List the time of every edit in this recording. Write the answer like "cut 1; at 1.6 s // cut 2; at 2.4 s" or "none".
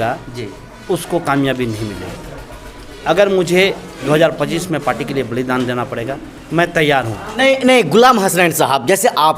cut 1; at 7.3 s

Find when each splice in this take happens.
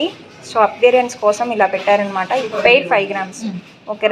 cut 1; at 2.4 s

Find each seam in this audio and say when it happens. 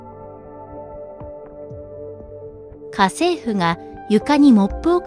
cut 1; at 2.9 s

